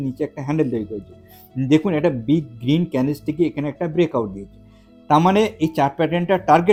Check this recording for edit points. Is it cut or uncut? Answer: uncut